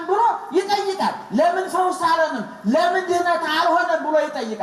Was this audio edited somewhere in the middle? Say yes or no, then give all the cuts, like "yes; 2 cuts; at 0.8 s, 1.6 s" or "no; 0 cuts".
no; 0 cuts